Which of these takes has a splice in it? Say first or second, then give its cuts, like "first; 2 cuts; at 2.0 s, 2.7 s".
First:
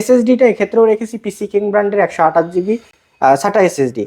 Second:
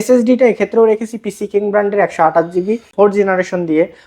second; 1 cut; at 2.9 s